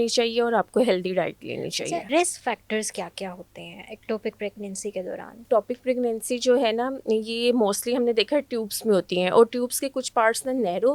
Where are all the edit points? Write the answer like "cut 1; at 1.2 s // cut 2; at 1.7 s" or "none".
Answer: cut 1; at 2.1 s // cut 2; at 5.5 s